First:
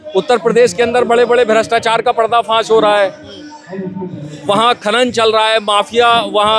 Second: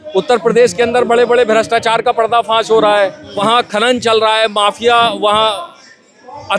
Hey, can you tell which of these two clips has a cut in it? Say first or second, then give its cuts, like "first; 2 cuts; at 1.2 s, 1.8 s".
second; 1 cut; at 3.2 s